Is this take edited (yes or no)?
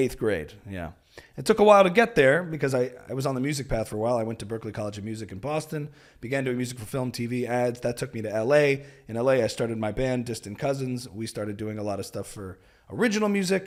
no